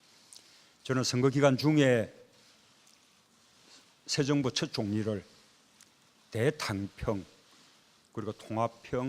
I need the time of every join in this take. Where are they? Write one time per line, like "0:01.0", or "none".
0:04.9